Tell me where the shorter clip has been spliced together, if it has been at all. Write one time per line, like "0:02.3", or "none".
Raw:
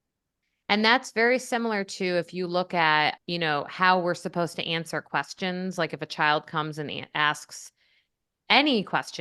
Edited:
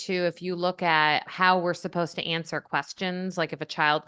0:01.3